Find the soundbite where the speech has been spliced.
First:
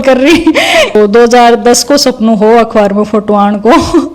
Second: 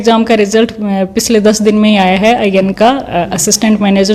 first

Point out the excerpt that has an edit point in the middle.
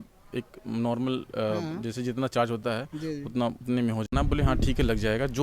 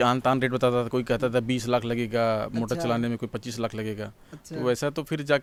first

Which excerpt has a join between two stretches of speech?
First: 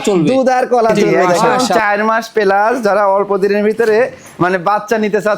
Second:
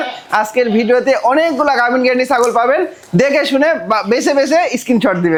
first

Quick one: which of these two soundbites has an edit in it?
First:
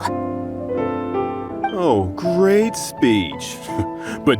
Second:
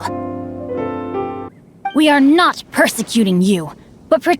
second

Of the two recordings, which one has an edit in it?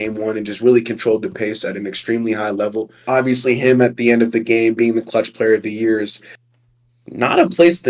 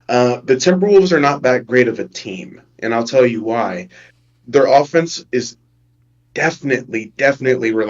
first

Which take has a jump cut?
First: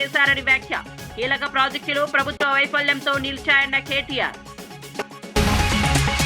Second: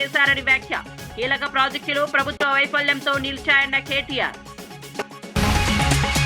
second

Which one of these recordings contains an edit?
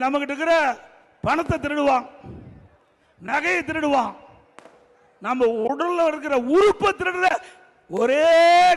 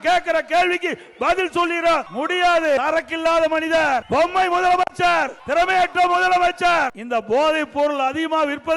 second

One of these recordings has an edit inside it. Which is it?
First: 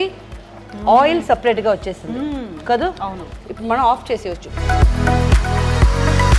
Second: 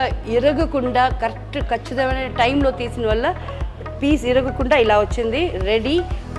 first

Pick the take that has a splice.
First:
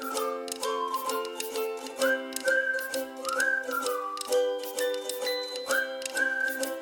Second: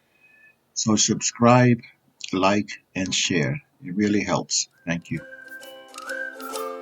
second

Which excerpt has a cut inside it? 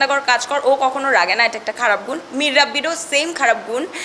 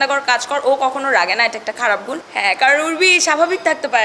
second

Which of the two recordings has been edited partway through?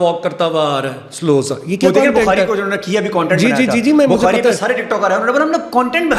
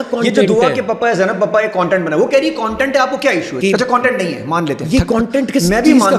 second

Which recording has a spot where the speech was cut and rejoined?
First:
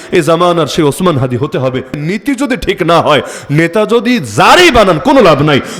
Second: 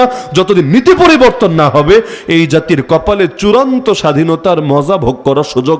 first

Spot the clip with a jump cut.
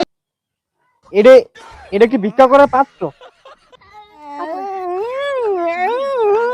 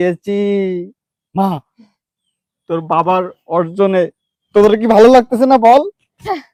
first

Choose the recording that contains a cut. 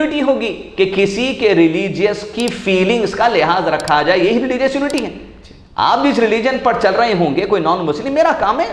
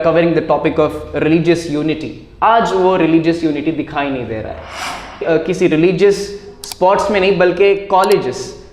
second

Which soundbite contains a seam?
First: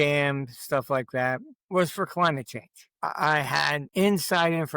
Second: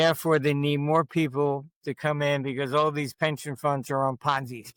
first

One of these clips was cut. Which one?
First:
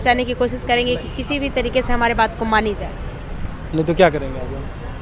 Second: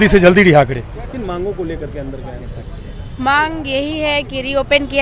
second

